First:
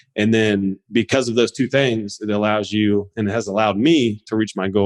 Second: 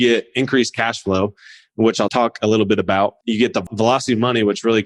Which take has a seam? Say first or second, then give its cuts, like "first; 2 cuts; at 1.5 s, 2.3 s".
second; 2 cuts; at 2.1 s, 3.7 s